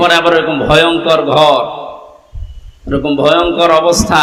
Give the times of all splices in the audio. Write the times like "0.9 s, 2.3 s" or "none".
none